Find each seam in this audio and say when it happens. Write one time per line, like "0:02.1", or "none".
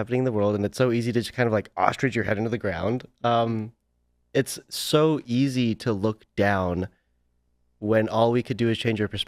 none